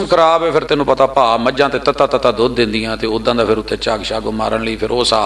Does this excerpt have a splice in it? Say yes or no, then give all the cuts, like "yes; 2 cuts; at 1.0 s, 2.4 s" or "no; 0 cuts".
no; 0 cuts